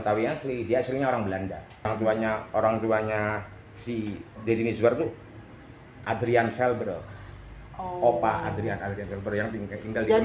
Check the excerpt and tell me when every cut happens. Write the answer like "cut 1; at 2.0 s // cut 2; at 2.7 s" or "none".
cut 1; at 1.9 s